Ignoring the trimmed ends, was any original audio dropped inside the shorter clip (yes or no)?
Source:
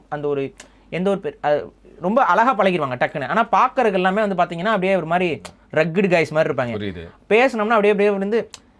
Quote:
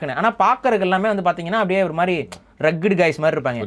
no